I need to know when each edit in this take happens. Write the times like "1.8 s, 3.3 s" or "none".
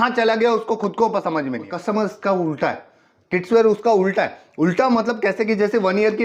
1.7 s